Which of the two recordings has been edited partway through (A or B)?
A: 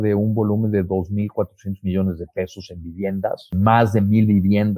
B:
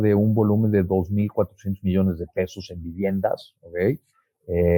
A